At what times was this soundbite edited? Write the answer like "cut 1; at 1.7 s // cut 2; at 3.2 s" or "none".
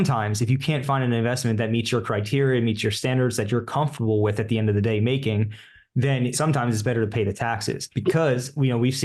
cut 1; at 0.8 s // cut 2; at 6.3 s // cut 3; at 7.9 s